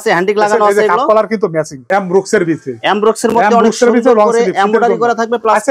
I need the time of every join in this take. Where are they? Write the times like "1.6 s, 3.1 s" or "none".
1.8 s